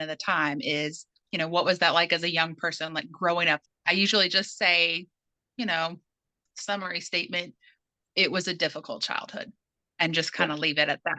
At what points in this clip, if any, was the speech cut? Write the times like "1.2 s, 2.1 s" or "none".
1.2 s, 3.6 s